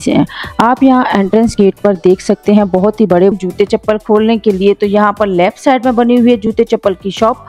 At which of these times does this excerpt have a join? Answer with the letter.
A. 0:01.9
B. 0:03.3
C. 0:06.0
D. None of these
B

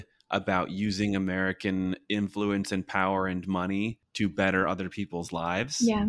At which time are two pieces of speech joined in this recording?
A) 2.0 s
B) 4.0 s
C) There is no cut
B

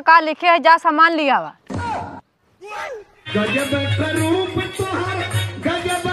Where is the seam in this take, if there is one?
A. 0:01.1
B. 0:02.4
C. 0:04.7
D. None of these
D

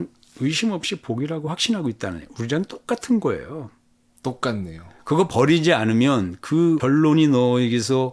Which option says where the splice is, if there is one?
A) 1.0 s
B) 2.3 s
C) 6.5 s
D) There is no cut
D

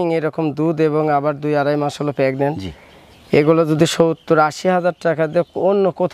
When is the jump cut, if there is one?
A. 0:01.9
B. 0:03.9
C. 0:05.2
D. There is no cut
D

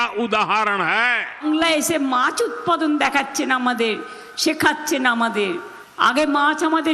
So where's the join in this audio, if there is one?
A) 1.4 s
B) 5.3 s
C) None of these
A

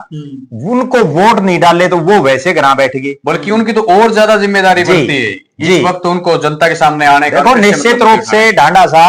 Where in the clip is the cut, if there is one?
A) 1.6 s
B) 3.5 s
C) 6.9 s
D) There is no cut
D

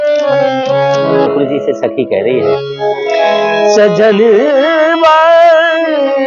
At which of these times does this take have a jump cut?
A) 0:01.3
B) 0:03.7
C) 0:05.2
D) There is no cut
A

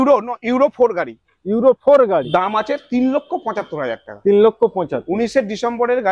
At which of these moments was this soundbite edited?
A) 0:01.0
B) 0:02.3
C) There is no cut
B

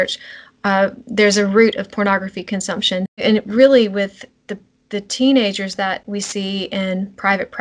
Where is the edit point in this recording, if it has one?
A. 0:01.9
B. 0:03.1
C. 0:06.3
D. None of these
B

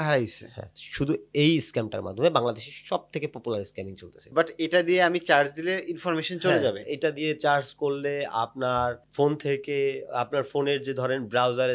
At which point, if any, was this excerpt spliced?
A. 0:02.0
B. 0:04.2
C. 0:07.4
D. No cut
B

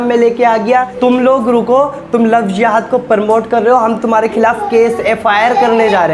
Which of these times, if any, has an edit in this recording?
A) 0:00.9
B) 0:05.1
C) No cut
A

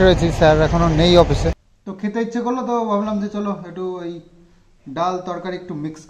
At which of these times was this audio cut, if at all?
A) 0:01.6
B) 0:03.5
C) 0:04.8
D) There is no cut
A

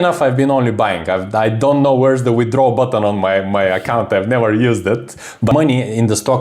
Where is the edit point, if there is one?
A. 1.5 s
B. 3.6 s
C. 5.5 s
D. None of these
C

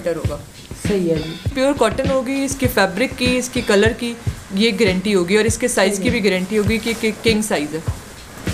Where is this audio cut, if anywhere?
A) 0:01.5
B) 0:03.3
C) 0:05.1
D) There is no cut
A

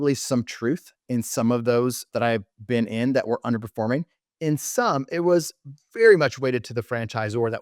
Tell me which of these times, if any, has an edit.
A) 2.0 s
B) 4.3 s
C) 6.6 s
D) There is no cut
A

